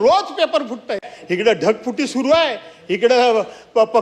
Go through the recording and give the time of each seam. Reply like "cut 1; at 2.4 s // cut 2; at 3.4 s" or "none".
cut 1; at 1.1 s

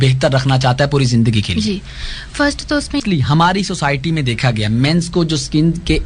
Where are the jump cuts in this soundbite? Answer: cut 1; at 3.0 s

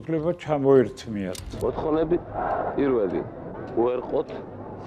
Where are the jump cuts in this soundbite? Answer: cut 1; at 1.4 s

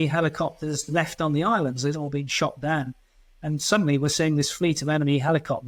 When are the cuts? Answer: none

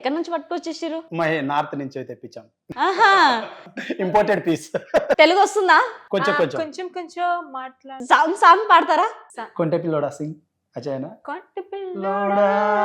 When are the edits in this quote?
cut 1; at 5.2 s // cut 2; at 8.0 s

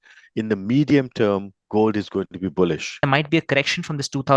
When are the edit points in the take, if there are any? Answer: cut 1; at 2.9 s

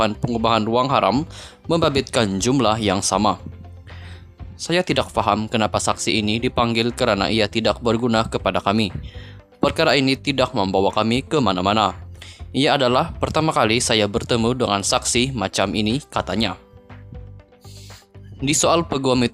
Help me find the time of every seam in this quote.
cut 1; at 16.6 s // cut 2; at 18.4 s

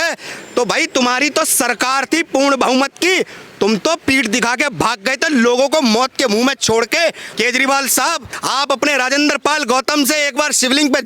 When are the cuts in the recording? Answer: cut 1; at 7.2 s // cut 2; at 8.4 s

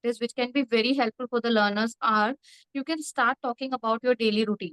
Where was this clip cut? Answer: none

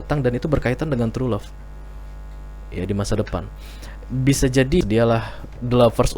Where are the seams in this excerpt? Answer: cut 1; at 4.8 s

